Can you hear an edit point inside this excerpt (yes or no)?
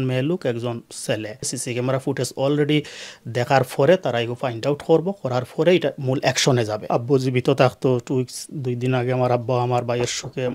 yes